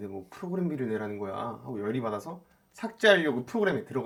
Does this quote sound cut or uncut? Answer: uncut